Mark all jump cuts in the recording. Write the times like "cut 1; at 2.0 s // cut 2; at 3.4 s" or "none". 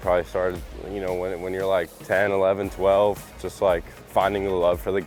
cut 1; at 2.0 s